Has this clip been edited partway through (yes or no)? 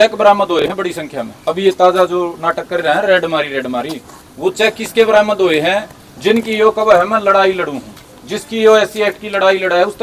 no